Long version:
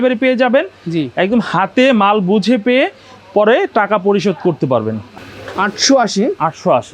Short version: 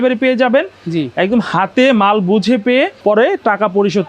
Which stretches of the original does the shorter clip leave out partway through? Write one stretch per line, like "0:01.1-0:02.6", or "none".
0:03.0-0:03.3